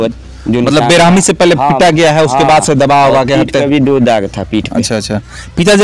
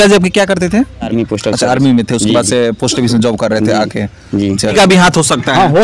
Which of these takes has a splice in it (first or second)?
second